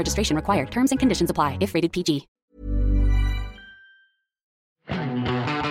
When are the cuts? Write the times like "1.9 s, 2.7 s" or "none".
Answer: 2.3 s, 4.7 s

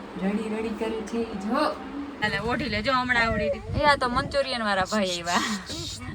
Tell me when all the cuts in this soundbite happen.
2.2 s

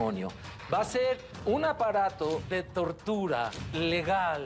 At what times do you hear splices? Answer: 1.3 s, 2.4 s, 3.6 s

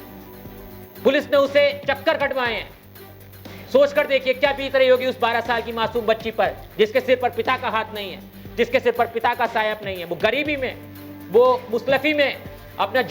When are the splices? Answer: 1.0 s

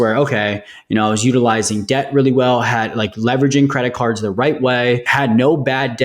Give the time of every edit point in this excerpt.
5.1 s

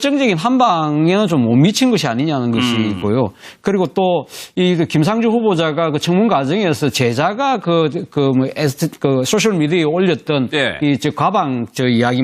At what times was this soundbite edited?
6.9 s

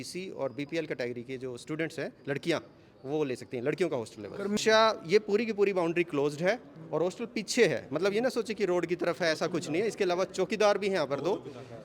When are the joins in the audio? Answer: 4.6 s

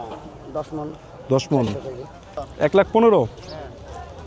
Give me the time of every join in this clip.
2.4 s

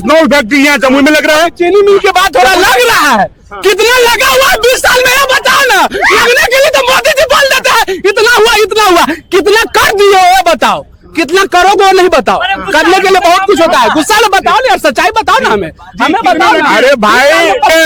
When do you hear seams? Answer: none

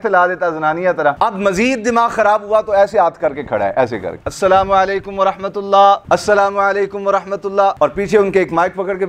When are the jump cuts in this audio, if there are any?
1.2 s, 4.2 s

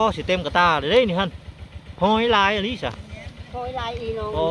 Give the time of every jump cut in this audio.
none

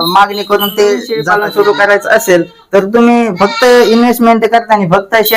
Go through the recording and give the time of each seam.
1.2 s

